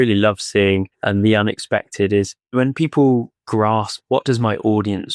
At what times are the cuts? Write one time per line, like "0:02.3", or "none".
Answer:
0:00.9
0:02.4
0:03.6